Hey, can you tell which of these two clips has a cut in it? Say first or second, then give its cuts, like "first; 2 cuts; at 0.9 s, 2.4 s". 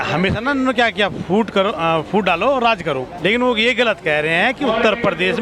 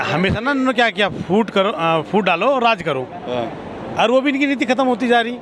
first; 1 cut; at 3.1 s